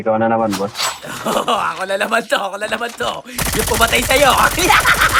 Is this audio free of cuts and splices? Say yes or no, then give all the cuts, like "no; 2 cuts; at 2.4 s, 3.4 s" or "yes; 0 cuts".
yes; 0 cuts